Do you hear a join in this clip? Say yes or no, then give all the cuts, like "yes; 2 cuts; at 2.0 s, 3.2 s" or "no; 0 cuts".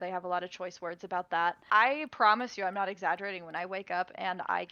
yes; 1 cut; at 1.6 s